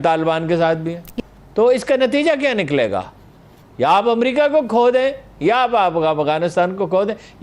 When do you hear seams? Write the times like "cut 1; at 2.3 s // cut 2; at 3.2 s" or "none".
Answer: cut 1; at 1.0 s